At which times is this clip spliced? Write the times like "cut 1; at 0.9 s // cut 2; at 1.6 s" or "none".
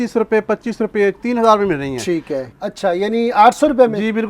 cut 1; at 2.4 s